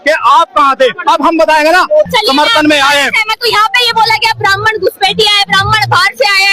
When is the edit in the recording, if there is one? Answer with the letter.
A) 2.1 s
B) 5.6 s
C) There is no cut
A